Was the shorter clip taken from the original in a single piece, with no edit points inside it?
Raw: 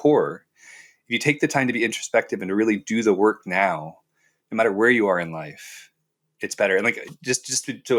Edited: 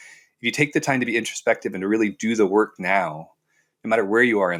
yes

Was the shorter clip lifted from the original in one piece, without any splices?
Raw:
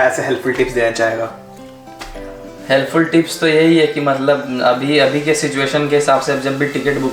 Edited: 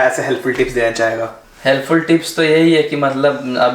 no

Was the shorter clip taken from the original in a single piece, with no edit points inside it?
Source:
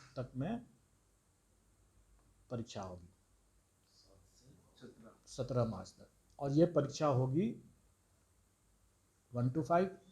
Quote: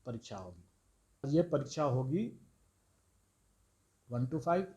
no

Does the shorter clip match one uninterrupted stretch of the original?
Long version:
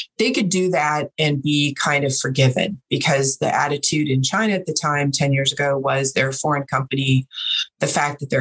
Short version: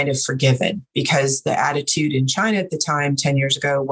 yes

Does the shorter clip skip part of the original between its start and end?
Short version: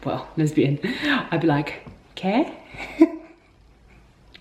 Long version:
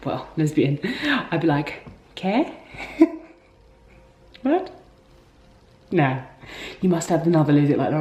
no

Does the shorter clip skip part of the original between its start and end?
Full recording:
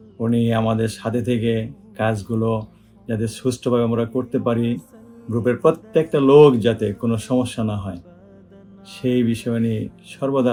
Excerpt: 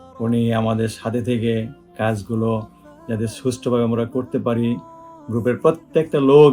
no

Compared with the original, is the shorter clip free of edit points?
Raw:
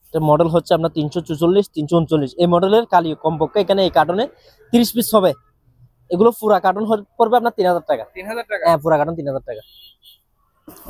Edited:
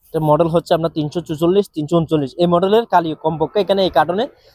yes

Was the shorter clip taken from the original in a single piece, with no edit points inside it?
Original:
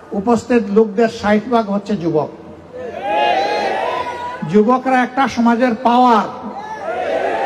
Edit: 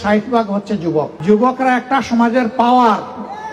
no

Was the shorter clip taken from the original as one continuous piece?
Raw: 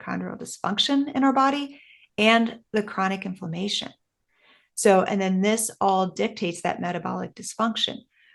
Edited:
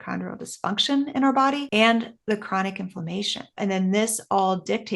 no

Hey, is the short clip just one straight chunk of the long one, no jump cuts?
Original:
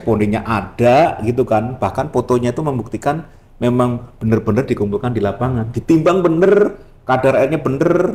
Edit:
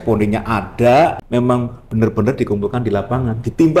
no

